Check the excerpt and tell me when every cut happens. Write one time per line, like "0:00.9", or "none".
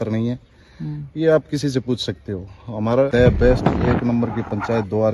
0:03.1